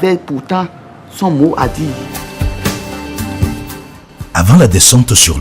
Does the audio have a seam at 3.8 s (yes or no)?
yes